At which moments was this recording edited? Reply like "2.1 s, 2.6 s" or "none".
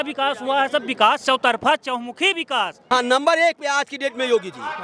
2.8 s